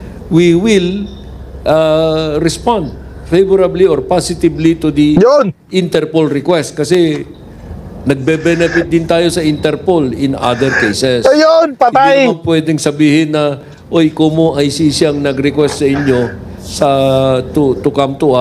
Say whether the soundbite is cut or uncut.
uncut